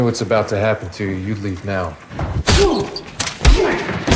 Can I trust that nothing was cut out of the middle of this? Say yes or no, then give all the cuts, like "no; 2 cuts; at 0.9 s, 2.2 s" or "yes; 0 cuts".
yes; 0 cuts